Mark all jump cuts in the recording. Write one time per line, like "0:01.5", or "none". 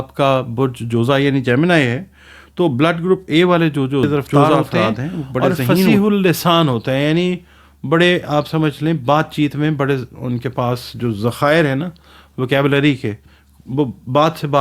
0:05.9